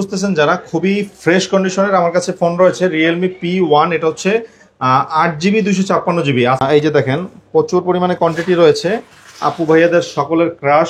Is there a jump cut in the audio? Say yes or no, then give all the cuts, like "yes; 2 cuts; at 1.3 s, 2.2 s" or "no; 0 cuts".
yes; 1 cut; at 6.6 s